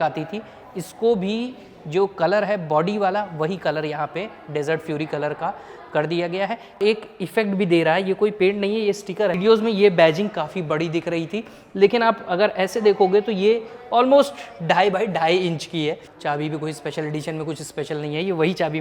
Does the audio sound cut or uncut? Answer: cut